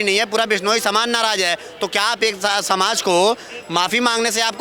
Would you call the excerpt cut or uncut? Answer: uncut